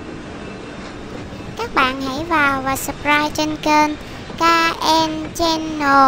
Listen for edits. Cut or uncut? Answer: cut